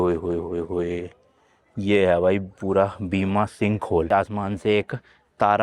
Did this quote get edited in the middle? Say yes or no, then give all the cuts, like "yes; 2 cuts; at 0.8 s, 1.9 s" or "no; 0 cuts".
yes; 1 cut; at 4.1 s